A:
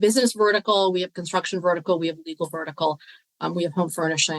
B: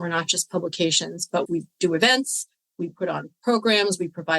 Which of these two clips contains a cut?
B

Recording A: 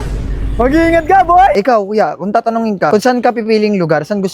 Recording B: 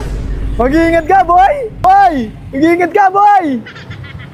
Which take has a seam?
A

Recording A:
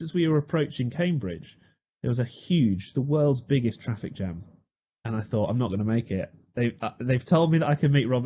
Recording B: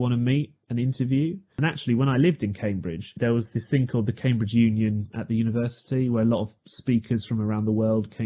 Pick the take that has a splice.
B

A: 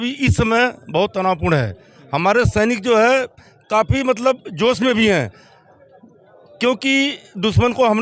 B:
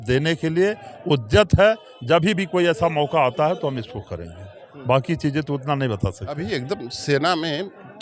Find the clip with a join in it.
B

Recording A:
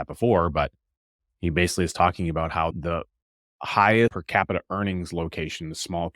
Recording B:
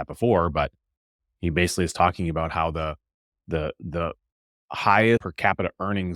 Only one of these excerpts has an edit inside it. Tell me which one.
A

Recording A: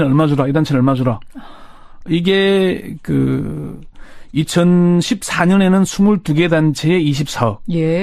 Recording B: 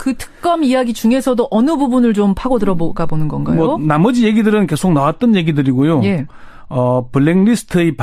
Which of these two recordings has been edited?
B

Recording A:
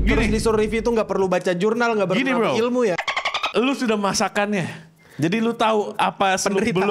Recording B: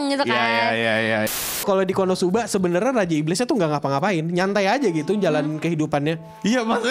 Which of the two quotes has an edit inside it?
B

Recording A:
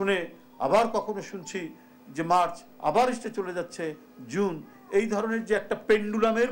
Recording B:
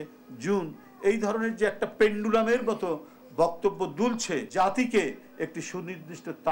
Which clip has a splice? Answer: B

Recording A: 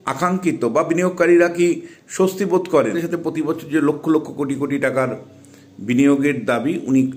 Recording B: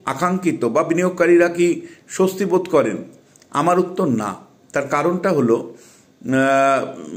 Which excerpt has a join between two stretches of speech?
A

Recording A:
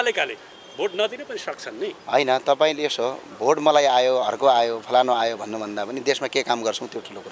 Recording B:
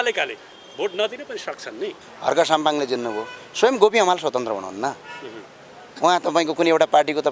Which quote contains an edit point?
B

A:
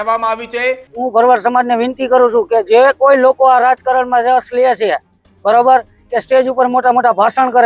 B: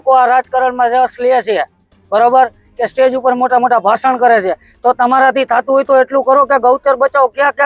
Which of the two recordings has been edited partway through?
A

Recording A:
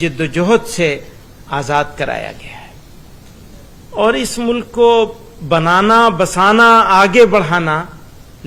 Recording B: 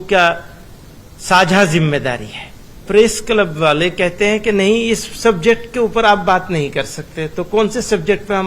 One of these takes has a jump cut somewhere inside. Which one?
B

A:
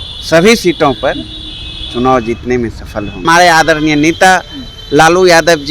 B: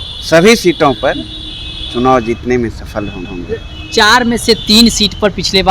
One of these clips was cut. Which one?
A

